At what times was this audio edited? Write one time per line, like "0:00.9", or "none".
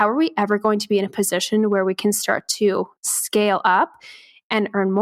none